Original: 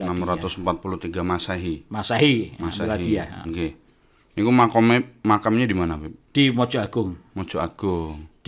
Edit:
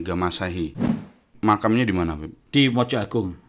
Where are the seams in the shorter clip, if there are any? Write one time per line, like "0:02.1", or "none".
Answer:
0:01.1